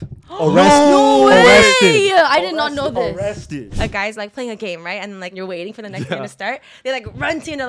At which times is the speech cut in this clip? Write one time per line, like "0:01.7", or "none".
0:03.6
0:05.4